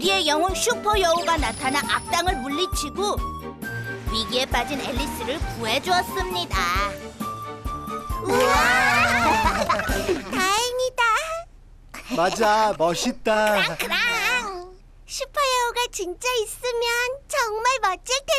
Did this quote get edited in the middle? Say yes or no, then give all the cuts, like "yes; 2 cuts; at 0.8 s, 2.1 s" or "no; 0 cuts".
no; 0 cuts